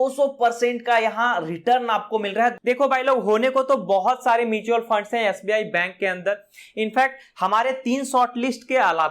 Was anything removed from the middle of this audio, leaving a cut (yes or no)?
yes